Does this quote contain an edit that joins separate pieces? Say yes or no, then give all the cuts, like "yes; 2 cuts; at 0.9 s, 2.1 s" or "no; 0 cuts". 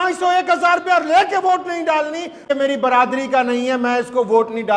yes; 1 cut; at 2.5 s